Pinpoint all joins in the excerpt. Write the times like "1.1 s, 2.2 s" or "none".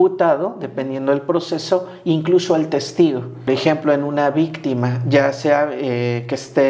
3.5 s